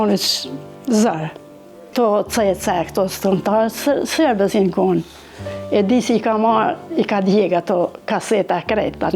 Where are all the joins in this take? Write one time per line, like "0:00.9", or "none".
0:01.9